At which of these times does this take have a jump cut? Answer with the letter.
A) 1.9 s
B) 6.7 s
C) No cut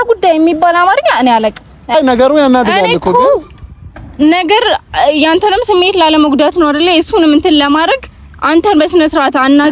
A